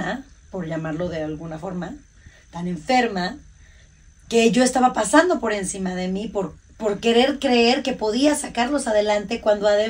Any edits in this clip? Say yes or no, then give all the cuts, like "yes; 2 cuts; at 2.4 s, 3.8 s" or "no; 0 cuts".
no; 0 cuts